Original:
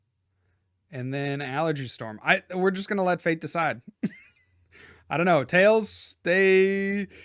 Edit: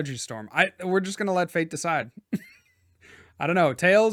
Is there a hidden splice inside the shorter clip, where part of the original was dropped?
no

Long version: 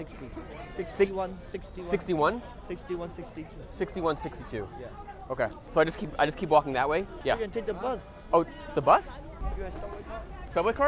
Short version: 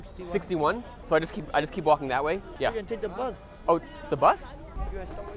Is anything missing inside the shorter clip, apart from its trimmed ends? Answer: yes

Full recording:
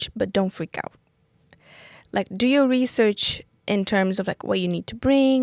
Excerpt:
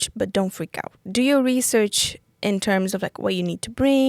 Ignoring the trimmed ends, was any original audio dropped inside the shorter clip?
yes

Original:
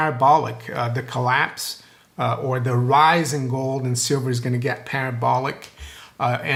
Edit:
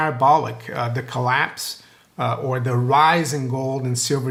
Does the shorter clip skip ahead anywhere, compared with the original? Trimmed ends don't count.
no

